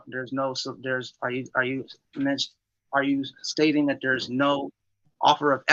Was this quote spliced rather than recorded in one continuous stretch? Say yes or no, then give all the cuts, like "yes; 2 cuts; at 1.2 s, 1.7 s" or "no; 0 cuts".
no; 0 cuts